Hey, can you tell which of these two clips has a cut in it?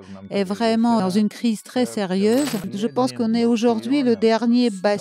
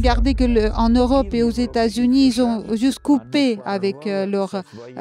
first; 2 cuts; at 1.0 s, 2.7 s

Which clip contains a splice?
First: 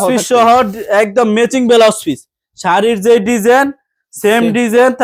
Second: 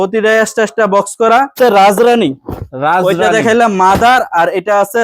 second; 1 cut; at 1.5 s

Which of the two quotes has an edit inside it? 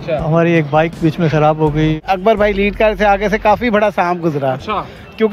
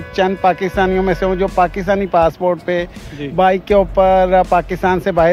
first; 1 cut; at 2.0 s

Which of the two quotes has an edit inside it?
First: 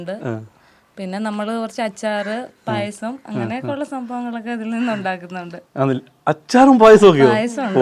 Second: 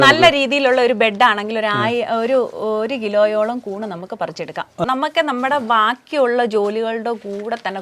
second; 1 cut; at 4.9 s

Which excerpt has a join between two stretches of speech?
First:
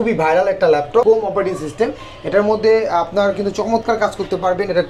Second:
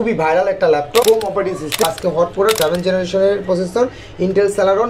second; 1 cut; at 1.8 s

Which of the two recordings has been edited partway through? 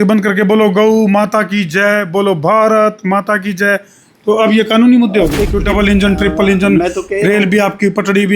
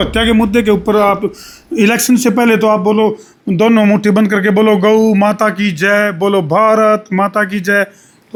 first; 1 cut; at 5.4 s

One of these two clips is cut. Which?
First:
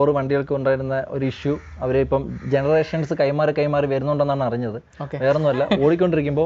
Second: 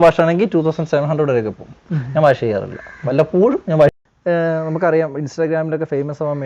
second; 1 cut; at 3.9 s

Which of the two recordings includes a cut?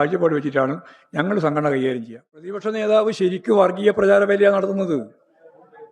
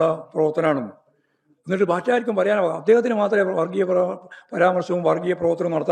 first; 1 cut; at 2.6 s

